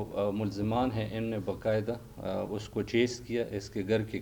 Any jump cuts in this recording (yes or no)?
no